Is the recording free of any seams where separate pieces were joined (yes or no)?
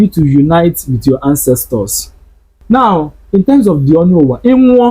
no